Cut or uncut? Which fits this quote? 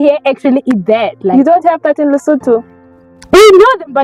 uncut